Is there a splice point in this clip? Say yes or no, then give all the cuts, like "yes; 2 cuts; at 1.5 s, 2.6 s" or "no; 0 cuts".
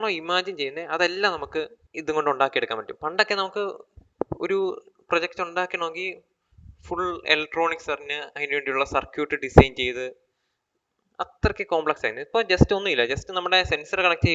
yes; 1 cut; at 1.8 s